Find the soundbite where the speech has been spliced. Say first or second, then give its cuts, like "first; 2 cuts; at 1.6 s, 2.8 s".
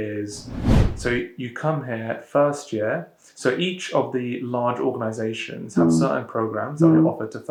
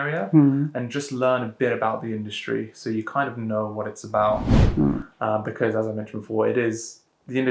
second; 1 cut; at 4.6 s